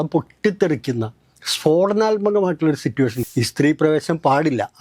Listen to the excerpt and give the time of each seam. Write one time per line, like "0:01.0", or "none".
0:03.2